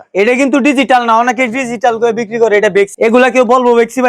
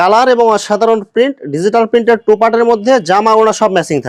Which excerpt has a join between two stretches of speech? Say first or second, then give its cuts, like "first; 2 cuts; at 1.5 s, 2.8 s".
first; 1 cut; at 2.9 s